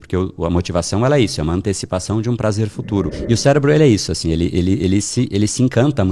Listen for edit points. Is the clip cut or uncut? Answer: cut